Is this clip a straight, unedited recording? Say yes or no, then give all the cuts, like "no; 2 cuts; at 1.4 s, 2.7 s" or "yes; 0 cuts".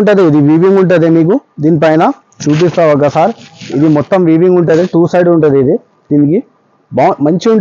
yes; 0 cuts